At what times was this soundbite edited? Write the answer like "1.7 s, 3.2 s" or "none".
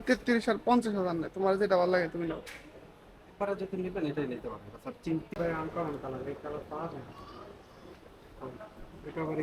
5.3 s